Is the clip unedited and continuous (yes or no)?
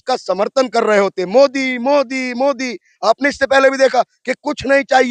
yes